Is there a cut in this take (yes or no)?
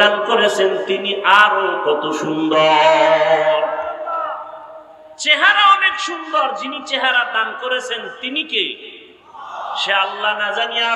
no